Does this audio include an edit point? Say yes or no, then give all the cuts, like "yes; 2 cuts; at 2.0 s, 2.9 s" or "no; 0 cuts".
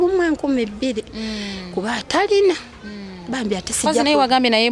no; 0 cuts